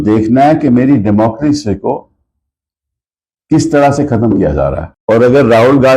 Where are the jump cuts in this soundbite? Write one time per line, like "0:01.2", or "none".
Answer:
0:04.9